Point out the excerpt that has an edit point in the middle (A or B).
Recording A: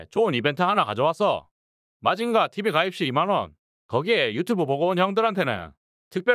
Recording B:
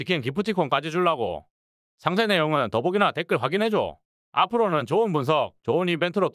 A